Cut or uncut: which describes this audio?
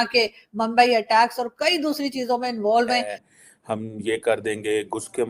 cut